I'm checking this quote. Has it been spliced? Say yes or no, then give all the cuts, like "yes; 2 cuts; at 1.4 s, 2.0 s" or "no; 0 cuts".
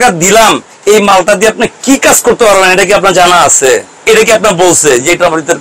no; 0 cuts